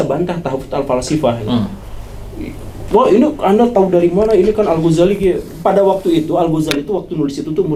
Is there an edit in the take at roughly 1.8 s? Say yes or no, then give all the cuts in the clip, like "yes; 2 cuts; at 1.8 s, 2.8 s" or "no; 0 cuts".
no; 0 cuts